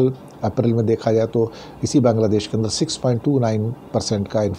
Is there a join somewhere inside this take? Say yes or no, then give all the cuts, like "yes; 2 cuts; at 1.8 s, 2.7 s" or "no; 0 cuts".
no; 0 cuts